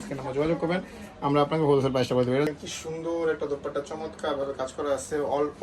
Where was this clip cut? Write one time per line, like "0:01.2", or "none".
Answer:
0:02.5